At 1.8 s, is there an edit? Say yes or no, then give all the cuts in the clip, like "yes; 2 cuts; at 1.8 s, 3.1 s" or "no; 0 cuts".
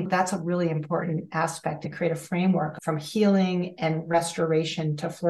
yes; 2 cuts; at 1.8 s, 2.7 s